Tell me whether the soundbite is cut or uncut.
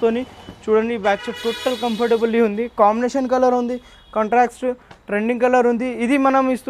uncut